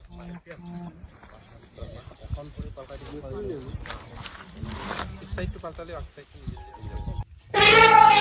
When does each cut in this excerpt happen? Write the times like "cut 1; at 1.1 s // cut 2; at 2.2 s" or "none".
cut 1; at 7.2 s